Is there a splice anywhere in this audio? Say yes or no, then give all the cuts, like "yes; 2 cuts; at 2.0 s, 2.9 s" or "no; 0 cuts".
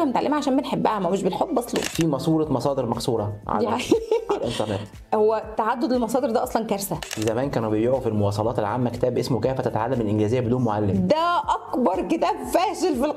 yes; 2 cuts; at 1.9 s, 7.1 s